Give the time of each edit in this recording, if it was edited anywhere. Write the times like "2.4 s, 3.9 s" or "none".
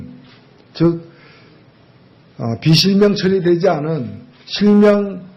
1.6 s

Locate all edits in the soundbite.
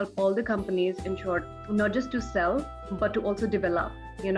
1.5 s

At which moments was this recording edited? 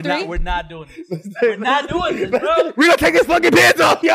2.7 s

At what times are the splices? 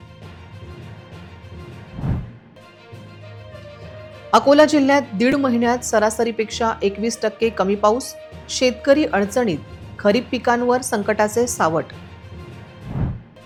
none

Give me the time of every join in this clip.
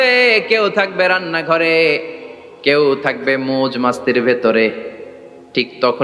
none

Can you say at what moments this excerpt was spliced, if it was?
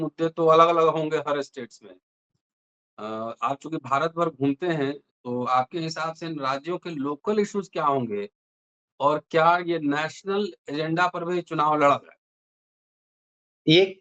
none

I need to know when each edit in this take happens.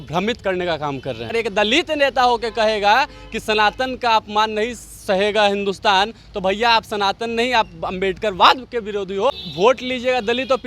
1.3 s, 9.3 s

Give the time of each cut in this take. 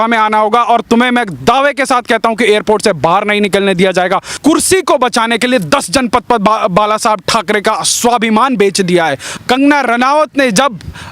4.4 s, 9.3 s

